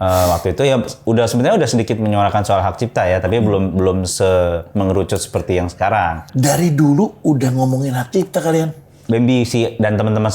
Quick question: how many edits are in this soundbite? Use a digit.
1